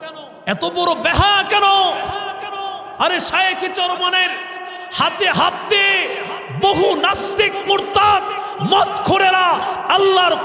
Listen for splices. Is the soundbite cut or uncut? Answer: uncut